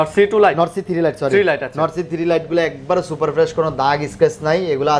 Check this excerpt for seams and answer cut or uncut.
uncut